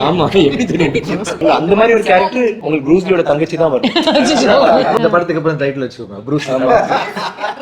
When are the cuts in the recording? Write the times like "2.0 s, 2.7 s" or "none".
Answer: 1.4 s, 2.6 s, 5.0 s